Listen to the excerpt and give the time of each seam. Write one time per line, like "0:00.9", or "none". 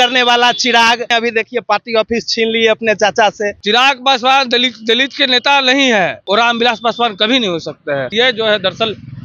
0:01.1
0:03.6
0:06.2
0:08.1